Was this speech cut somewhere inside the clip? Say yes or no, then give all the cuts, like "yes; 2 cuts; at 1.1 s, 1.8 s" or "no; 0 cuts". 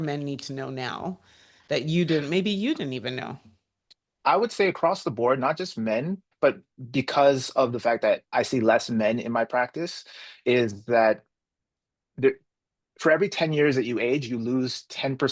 no; 0 cuts